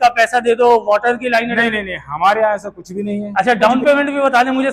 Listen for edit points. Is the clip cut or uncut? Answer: cut